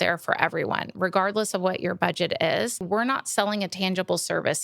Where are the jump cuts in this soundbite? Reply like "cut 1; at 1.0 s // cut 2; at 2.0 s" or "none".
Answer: cut 1; at 2.8 s